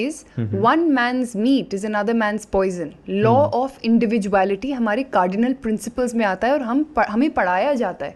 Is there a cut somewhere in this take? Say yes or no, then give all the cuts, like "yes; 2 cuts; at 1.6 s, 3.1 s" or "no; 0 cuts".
no; 0 cuts